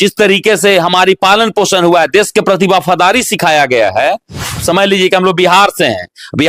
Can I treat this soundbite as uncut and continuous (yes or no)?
no